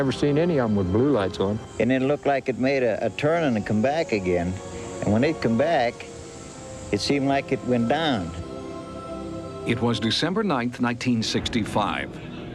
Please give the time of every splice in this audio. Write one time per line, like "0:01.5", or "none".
none

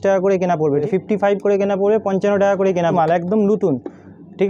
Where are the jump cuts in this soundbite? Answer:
0:00.8
0:02.9

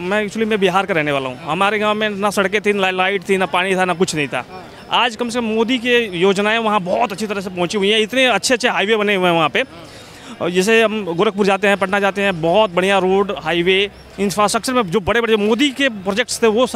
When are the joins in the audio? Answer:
none

